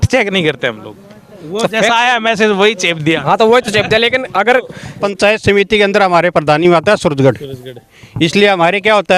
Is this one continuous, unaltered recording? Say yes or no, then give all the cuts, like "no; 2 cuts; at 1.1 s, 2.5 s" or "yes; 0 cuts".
no; 1 cut; at 5.0 s